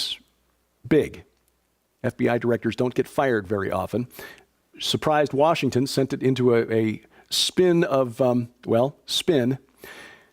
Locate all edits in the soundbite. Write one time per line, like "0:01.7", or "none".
0:05.9

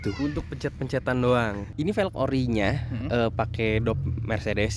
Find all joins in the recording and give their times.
0:01.6

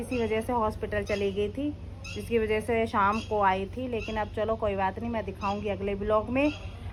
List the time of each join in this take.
none

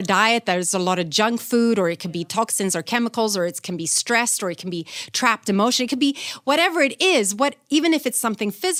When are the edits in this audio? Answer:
none

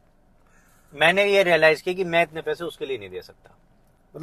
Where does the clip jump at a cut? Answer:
none

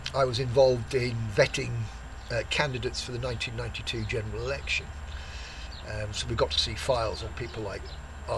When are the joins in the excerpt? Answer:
none

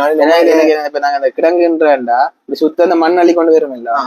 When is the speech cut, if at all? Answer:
none

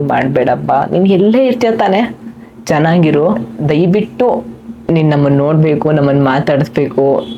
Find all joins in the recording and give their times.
0:03.5

